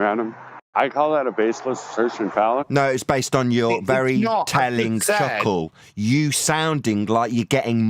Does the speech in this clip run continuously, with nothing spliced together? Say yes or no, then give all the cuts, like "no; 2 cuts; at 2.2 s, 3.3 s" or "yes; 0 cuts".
yes; 0 cuts